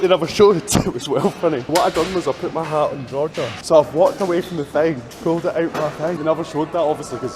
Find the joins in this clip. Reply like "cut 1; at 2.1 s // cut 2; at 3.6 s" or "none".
cut 1; at 1.7 s // cut 2; at 3.6 s // cut 3; at 6.2 s